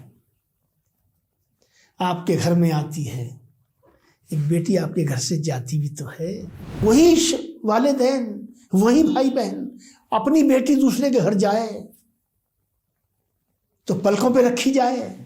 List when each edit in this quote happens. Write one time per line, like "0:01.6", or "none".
0:06.8